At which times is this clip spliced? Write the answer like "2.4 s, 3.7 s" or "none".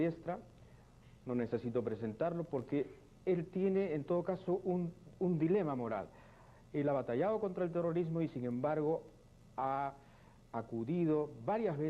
5.9 s

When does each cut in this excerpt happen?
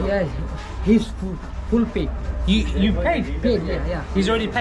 none

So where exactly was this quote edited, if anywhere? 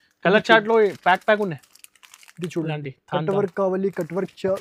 none

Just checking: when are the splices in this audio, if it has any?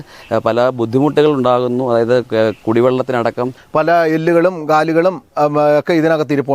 3.6 s

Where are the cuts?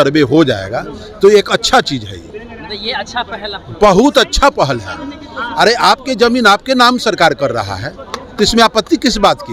none

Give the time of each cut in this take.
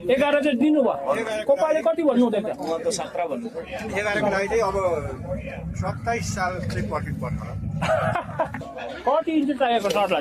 8.6 s

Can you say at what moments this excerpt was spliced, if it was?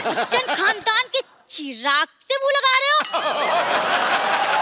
none

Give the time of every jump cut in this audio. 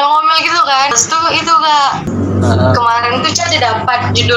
0.9 s, 2.1 s

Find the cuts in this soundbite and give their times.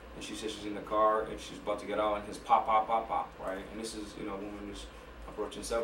none

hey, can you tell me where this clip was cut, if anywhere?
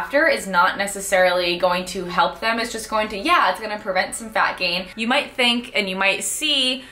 4.9 s

